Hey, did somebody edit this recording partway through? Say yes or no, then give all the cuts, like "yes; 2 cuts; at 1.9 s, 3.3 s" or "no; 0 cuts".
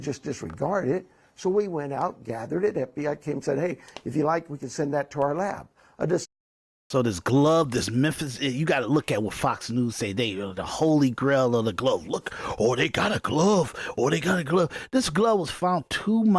no; 0 cuts